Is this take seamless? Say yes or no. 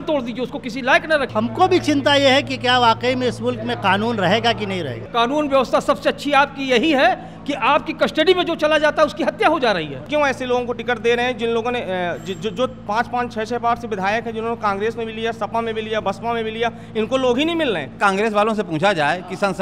no